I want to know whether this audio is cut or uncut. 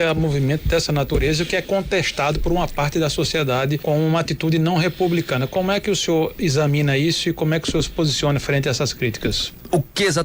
uncut